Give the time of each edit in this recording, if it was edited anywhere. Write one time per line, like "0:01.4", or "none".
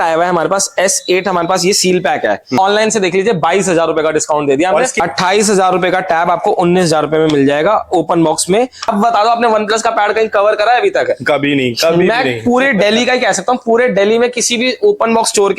0:02.6
0:05.0
0:08.9